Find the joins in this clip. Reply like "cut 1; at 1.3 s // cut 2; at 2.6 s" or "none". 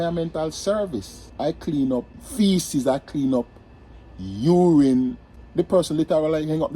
cut 1; at 1.2 s // cut 2; at 2.2 s // cut 3; at 5.4 s